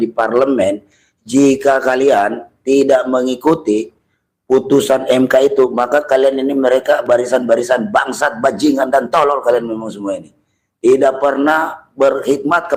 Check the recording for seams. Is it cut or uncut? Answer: uncut